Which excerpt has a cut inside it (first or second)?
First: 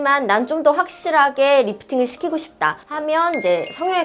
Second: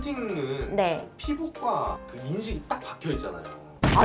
first